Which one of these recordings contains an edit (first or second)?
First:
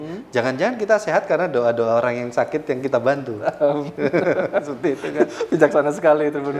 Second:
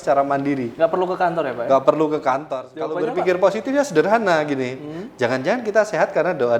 second